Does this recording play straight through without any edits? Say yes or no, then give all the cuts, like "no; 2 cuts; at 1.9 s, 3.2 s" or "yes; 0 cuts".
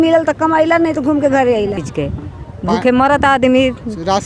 no; 1 cut; at 1.8 s